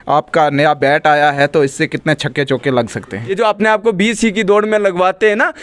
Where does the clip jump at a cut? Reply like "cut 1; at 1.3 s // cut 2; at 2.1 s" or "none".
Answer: cut 1; at 3.3 s